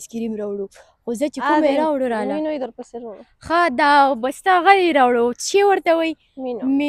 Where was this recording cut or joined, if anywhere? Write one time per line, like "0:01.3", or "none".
none

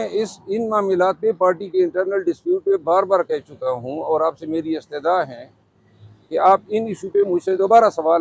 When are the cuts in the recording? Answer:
none

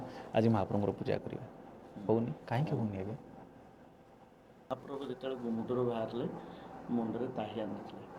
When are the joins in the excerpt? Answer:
0:04.7

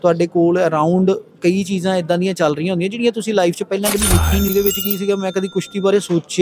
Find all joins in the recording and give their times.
0:04.5

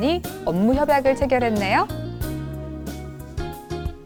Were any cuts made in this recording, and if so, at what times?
none

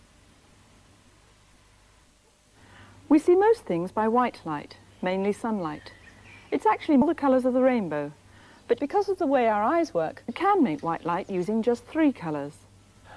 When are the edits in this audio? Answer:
0:11.9

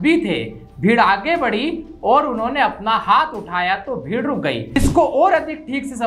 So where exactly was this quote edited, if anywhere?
0:04.8

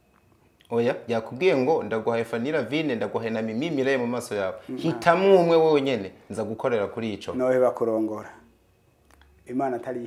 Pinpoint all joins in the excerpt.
none

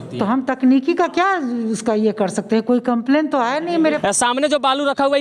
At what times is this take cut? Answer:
0:04.0

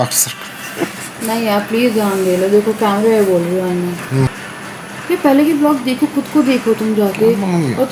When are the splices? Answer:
0:04.3

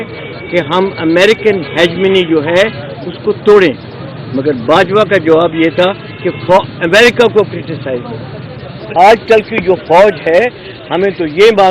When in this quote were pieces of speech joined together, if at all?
0:08.9

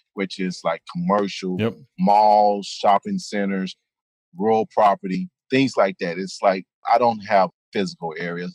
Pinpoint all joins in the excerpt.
0:06.8
0:07.6

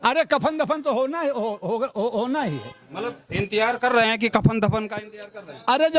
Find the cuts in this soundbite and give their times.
none

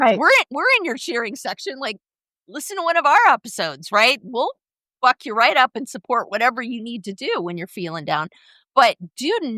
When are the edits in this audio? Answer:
none

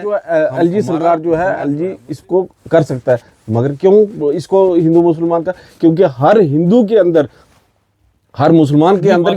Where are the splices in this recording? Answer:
none

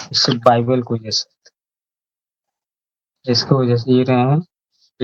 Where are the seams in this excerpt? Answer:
none

